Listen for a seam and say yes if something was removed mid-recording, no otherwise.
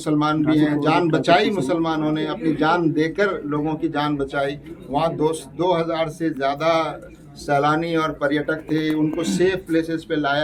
no